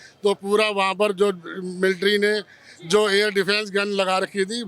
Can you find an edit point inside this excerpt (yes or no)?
no